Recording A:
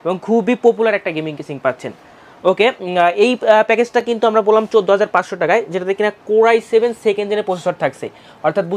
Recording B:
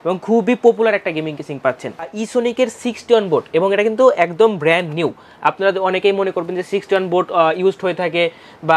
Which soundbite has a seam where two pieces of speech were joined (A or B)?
B